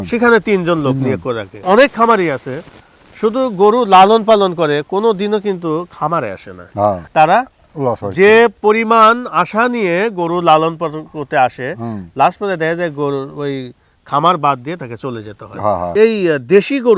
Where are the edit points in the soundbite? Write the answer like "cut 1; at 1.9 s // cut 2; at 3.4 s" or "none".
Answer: cut 1; at 1.6 s // cut 2; at 7.0 s // cut 3; at 15.9 s